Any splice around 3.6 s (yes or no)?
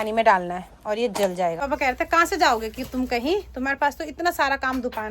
no